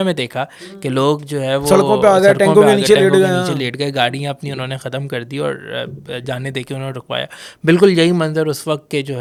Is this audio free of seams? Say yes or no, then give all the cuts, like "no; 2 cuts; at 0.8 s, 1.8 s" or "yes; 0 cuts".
yes; 0 cuts